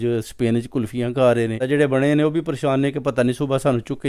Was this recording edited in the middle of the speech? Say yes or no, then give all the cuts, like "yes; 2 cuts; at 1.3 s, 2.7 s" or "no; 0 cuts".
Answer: yes; 1 cut; at 1.6 s